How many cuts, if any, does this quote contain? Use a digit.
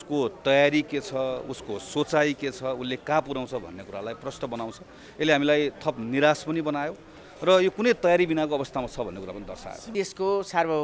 1